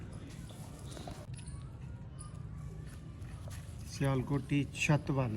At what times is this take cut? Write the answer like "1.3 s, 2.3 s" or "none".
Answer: 1.3 s